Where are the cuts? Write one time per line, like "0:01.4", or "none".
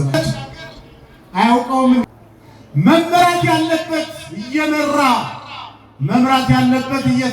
0:02.0